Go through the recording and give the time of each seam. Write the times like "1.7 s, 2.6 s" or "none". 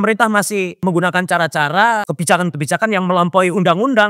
0.8 s, 2.0 s